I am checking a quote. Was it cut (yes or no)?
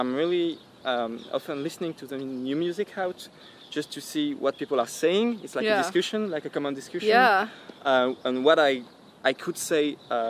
no